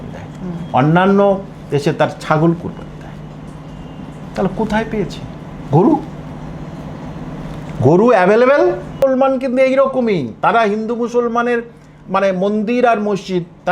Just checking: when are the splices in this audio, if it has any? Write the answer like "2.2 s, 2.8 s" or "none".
9.0 s

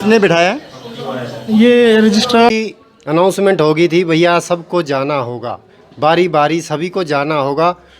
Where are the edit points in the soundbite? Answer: 2.5 s

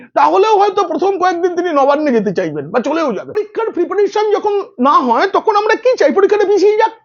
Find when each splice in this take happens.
3.4 s

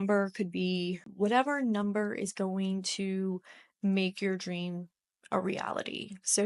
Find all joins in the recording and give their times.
1.1 s

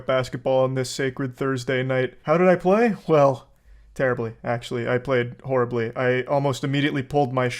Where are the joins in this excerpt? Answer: 2.2 s

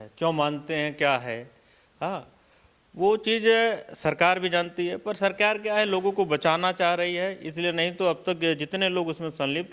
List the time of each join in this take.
none

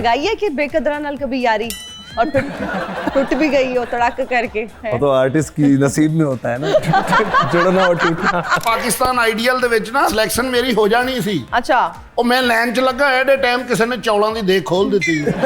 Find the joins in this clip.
4.8 s, 8.6 s, 10.1 s

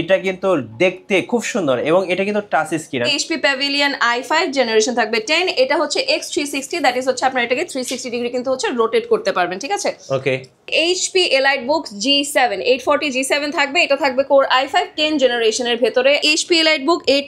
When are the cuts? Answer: 3.1 s, 10.7 s, 16.3 s

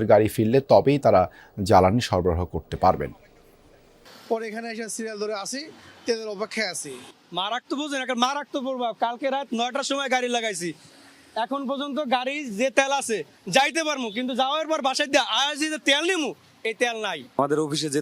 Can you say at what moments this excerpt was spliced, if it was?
3.9 s

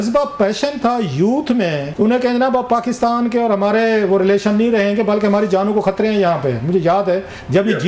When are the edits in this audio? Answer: 1.8 s

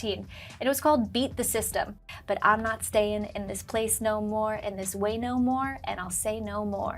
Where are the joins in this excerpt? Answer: 2.1 s

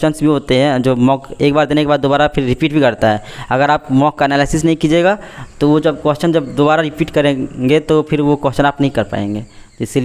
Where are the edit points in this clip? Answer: none

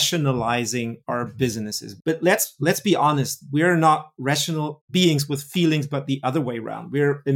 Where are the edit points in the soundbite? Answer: 1.0 s, 1.8 s

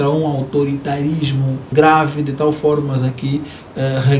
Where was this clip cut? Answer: 1.7 s

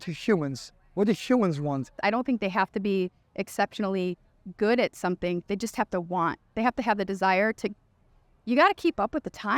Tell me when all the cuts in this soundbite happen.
1.9 s

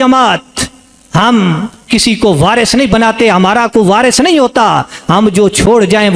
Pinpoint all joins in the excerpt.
none

